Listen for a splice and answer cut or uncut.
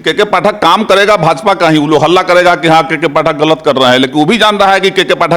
uncut